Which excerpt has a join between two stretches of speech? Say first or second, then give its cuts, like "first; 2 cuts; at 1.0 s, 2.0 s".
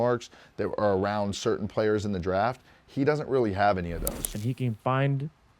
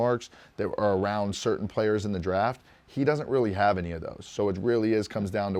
first; 1 cut; at 4.3 s